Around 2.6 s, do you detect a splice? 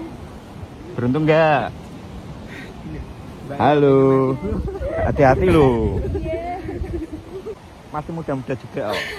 no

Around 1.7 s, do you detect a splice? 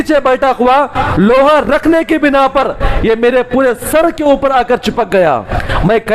no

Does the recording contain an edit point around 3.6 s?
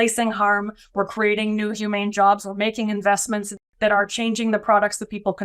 yes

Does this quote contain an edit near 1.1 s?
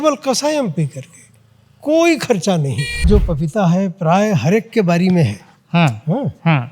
no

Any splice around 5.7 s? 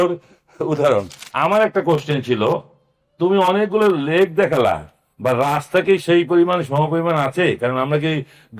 no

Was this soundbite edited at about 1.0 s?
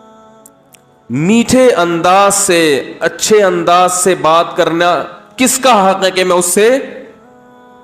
yes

